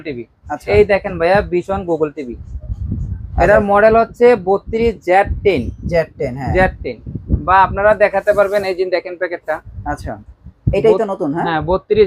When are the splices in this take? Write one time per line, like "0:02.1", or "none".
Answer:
none